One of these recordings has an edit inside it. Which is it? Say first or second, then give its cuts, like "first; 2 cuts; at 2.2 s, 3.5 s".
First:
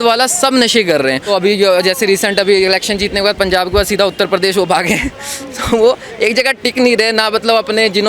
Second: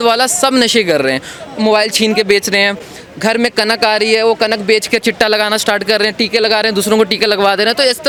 first; 1 cut; at 1.2 s